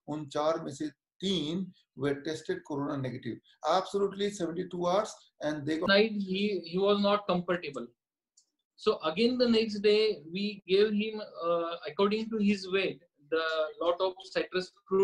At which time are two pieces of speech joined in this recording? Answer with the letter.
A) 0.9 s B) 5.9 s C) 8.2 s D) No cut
B